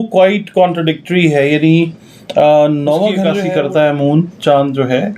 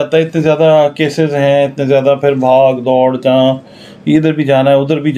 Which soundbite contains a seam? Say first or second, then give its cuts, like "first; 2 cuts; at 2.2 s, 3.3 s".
first; 1 cut; at 3.4 s